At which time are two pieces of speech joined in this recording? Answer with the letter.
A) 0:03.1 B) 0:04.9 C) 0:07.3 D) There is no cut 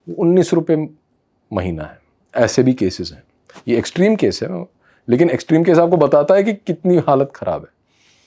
D